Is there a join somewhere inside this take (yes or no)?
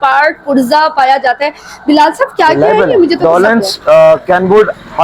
yes